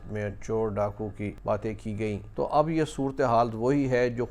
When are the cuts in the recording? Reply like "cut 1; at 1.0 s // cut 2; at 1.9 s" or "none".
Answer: cut 1; at 1.4 s // cut 2; at 2.3 s